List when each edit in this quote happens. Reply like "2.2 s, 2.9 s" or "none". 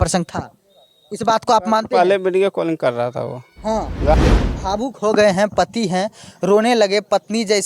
4.1 s